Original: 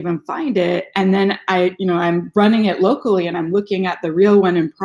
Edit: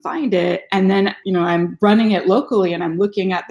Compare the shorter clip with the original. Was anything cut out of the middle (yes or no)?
yes